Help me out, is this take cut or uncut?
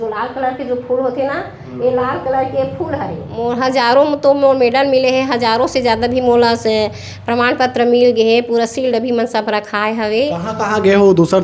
cut